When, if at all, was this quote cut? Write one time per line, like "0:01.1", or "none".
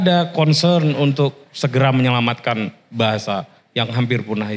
none